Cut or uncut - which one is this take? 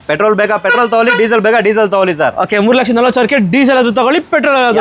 uncut